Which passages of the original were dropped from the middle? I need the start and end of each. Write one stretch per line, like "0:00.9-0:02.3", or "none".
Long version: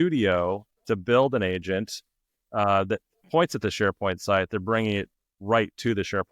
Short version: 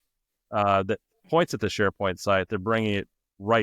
none